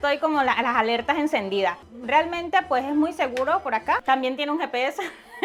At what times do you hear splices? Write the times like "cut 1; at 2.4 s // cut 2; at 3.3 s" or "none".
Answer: none